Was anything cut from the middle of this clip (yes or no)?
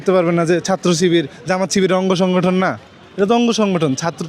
no